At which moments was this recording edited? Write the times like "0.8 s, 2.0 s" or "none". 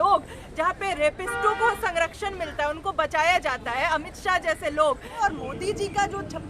5.2 s

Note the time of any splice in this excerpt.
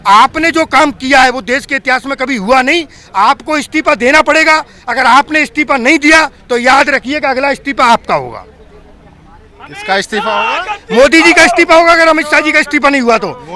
none

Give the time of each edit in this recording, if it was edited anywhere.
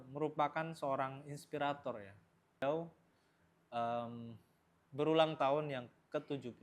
2.6 s

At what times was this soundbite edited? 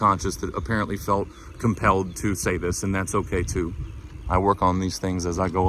none

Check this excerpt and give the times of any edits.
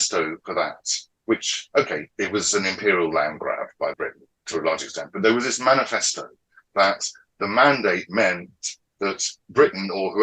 3.8 s, 9.3 s

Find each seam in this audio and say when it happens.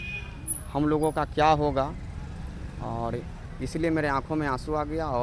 none

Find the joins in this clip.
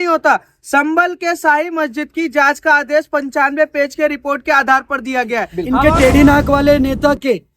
5.6 s

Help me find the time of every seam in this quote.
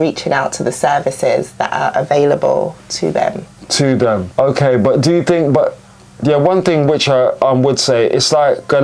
none

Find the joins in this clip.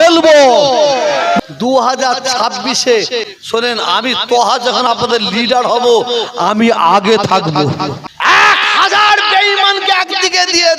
1.4 s, 3.3 s, 8.1 s

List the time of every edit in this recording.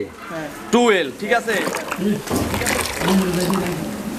1.8 s

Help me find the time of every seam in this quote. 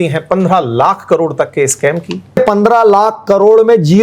2.4 s

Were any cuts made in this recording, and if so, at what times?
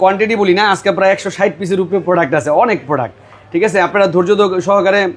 none

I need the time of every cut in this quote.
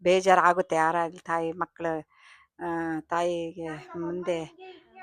none

